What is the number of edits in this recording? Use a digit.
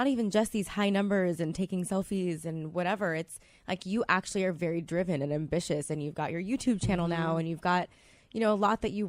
1